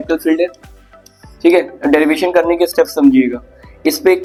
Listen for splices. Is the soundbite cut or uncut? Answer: uncut